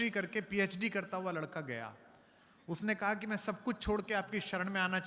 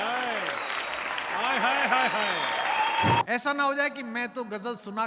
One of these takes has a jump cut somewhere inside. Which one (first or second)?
second